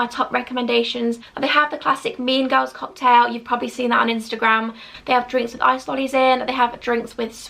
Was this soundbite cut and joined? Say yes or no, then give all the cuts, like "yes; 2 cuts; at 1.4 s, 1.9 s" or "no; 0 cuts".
yes; 2 cuts; at 1.2 s, 4.8 s